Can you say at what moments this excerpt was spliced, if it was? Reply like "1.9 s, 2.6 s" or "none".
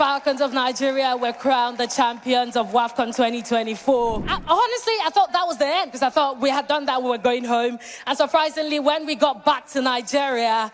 4.3 s